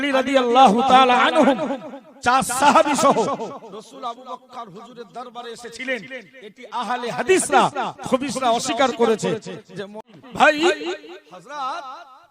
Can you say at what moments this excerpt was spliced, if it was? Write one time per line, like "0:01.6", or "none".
0:10.1

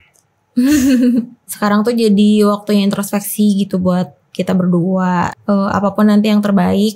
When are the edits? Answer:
0:01.4
0:05.3

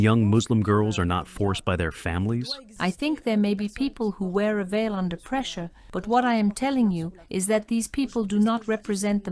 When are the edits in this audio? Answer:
0:02.6

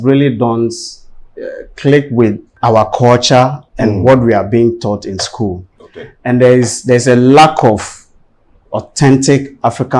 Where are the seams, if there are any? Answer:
0:02.5

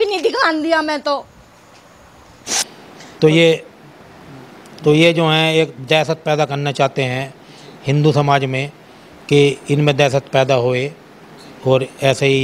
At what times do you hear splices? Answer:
0:02.6

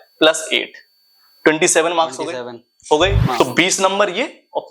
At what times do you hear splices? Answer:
0:03.4

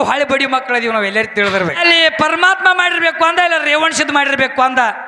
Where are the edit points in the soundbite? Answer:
0:01.8

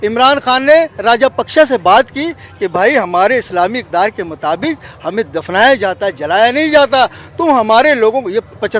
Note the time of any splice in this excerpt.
none

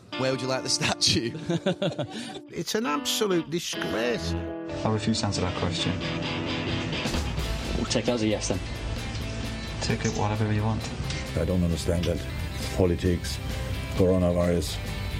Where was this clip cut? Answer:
none

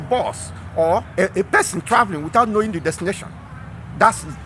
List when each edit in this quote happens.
0:01.1

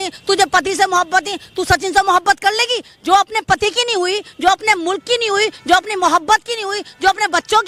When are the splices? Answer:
none

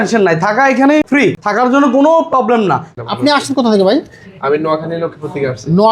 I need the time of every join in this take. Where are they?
0:01.2
0:02.9

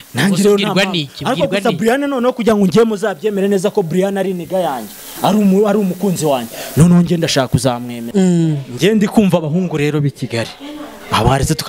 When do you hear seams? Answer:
0:08.0

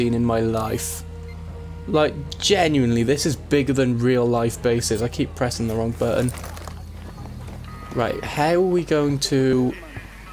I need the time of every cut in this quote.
none

